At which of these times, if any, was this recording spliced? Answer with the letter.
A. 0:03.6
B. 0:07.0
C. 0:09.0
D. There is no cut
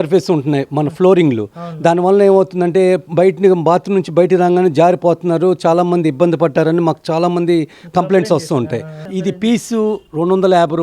C